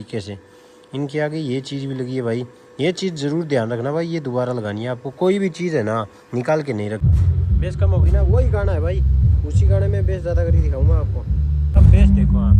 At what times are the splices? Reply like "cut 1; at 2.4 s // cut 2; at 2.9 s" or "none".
cut 1; at 7.0 s // cut 2; at 11.8 s

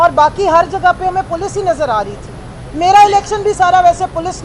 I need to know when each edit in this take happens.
none

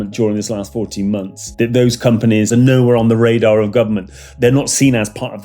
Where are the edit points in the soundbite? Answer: cut 1; at 1.4 s // cut 2; at 2.5 s // cut 3; at 4.3 s

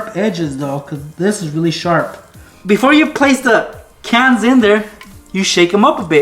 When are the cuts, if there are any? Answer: cut 1; at 2.5 s

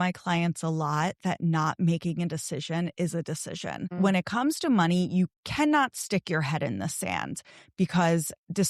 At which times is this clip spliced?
cut 1; at 3.9 s // cut 2; at 5.4 s

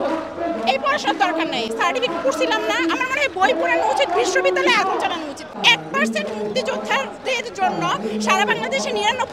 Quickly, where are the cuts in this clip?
none

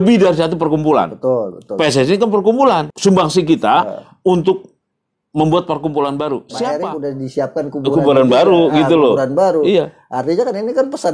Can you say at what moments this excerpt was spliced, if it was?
cut 1; at 2.9 s // cut 2; at 6.6 s

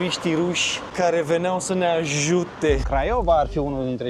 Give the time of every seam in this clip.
cut 1; at 2.8 s

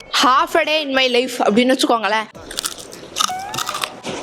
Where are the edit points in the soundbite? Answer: cut 1; at 2.3 s

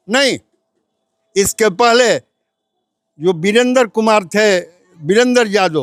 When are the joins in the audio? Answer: none

